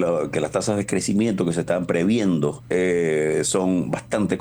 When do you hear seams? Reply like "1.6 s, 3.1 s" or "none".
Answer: 2.6 s